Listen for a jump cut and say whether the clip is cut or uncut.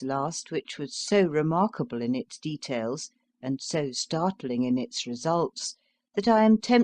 cut